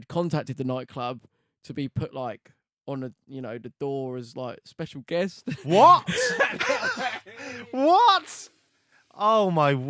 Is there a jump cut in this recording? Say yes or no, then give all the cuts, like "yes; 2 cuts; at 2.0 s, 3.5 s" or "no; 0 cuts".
no; 0 cuts